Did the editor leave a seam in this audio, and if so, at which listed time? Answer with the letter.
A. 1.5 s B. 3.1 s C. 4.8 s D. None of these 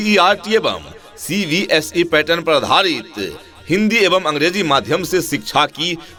D